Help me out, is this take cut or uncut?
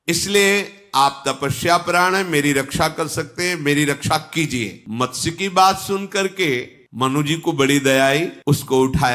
cut